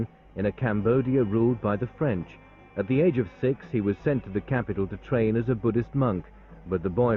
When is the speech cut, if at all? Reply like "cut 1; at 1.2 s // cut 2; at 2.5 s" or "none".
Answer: cut 1; at 3.6 s